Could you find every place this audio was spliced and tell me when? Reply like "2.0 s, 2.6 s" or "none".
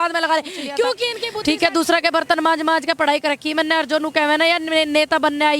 1.2 s